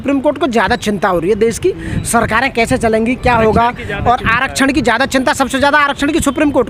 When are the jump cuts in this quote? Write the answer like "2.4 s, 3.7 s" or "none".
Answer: none